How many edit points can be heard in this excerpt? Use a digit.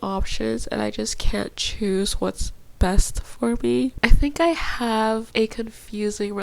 2